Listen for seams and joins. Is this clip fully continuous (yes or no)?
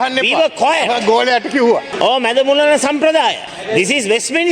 no